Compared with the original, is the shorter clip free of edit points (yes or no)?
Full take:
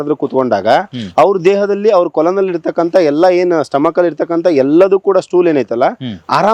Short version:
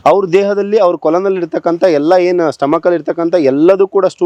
yes